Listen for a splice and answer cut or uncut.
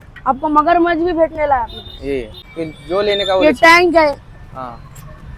cut